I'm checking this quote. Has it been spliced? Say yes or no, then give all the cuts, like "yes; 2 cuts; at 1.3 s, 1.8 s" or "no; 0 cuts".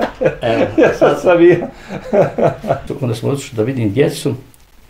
yes; 1 cut; at 2.8 s